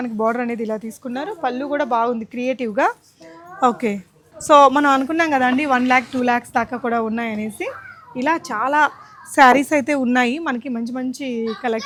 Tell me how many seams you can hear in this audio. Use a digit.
0